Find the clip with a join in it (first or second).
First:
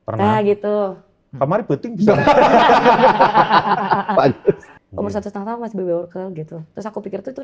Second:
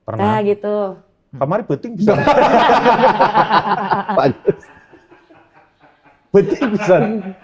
first